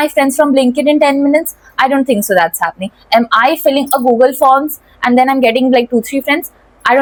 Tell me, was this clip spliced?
no; 0 cuts

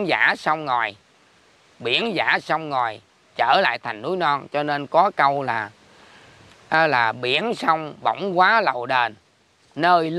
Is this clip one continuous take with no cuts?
yes; 0 cuts

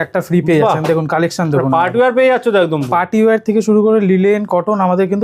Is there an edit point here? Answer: no; 0 cuts

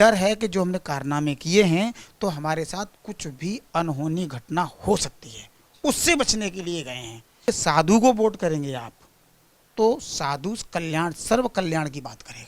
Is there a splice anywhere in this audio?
yes; 1 cut; at 7.4 s

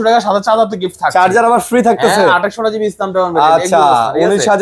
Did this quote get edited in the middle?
no; 0 cuts

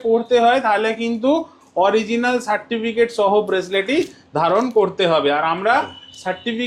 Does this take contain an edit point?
no; 0 cuts

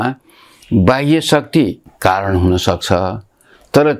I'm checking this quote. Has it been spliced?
yes; 1 cut; at 1.9 s

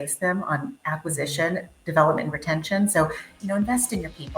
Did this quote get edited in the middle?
yes; 1 cut; at 3.3 s

